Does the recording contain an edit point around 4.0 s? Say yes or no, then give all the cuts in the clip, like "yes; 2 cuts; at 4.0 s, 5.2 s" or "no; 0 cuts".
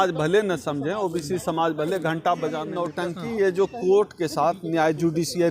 no; 1 cut; at 2.8 s